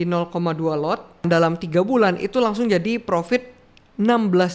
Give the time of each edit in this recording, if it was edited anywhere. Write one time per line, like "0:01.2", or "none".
0:01.2